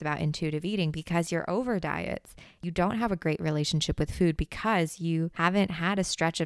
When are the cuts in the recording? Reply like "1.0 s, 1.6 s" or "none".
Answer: 2.6 s, 5.3 s